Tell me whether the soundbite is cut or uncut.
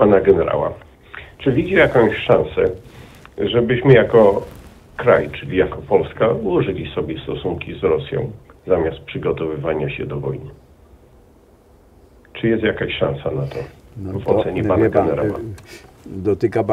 uncut